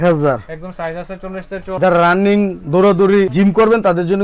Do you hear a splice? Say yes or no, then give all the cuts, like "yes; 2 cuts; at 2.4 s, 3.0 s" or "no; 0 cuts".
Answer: yes; 1 cut; at 1.6 s